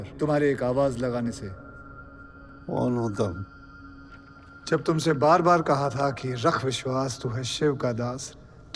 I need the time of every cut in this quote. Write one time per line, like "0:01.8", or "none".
none

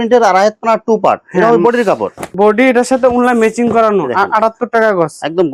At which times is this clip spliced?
none

